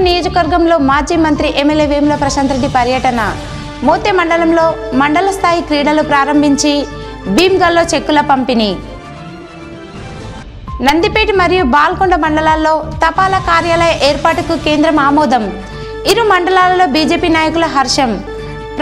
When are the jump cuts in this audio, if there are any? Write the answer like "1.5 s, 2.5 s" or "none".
none